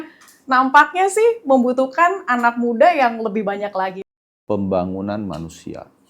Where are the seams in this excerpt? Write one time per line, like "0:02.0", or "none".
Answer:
0:04.0

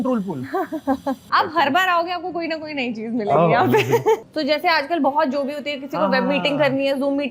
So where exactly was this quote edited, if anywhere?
0:01.4
0:04.2

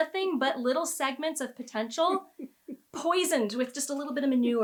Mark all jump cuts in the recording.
none

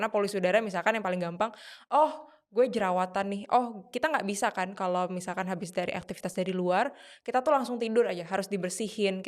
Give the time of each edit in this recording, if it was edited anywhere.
none

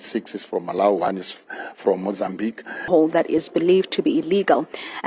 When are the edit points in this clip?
0:02.8

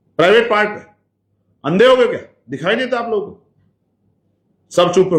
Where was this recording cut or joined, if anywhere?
none

